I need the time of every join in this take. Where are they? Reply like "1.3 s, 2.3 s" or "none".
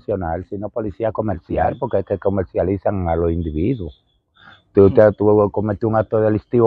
1.7 s

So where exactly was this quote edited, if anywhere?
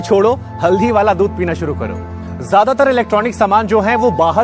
2.0 s

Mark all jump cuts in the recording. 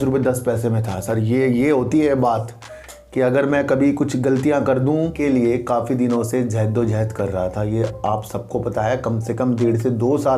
5.1 s

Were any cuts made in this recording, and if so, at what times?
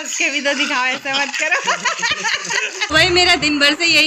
2.8 s

